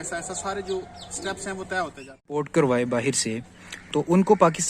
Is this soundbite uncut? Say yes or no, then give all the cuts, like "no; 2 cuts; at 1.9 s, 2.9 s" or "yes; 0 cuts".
no; 1 cut; at 2.4 s